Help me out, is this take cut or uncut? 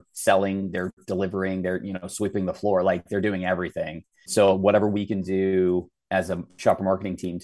cut